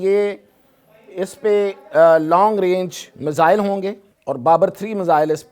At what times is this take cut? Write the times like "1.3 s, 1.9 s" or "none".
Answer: 4.1 s